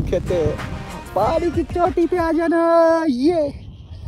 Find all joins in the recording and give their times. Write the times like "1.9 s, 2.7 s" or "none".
none